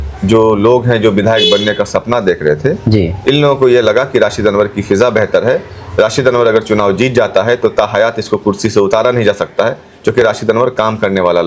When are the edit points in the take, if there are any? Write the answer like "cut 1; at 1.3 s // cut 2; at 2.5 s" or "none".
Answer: none

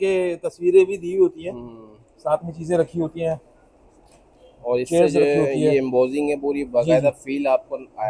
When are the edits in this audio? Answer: none

